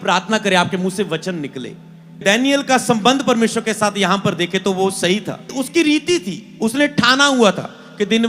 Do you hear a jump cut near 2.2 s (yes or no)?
yes